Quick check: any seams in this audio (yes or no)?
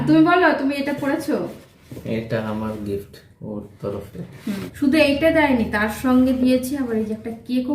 yes